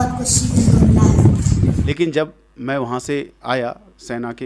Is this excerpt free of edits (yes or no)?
no